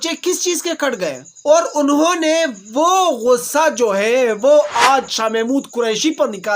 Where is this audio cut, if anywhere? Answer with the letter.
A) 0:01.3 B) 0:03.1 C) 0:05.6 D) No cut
A